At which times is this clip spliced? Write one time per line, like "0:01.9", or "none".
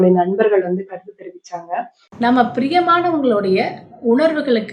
0:02.0